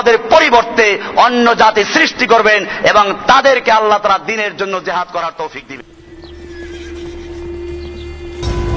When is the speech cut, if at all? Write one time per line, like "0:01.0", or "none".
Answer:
0:05.9